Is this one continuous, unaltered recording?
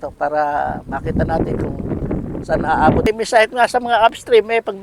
no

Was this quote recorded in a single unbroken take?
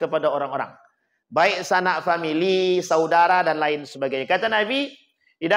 yes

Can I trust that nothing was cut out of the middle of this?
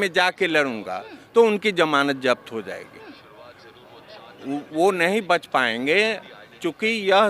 yes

